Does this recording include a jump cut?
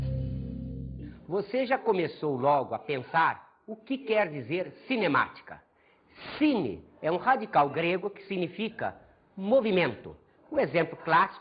yes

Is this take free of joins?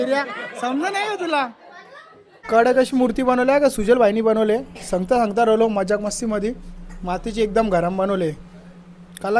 no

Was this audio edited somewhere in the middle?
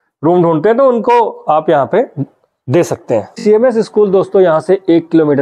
yes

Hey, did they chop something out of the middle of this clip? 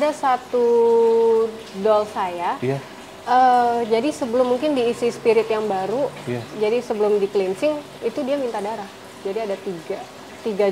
no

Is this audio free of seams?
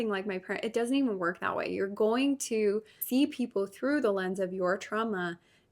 no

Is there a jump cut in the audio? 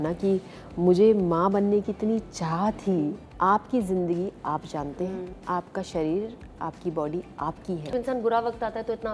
yes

